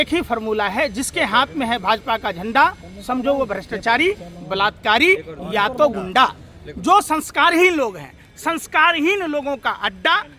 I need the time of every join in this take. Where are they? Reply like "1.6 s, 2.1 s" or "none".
none